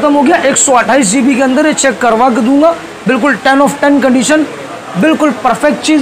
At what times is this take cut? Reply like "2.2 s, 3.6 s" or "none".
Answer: none